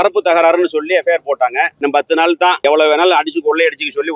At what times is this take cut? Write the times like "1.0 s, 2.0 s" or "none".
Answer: 1.8 s